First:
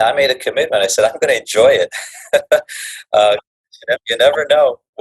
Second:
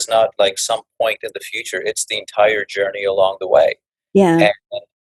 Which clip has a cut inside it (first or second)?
first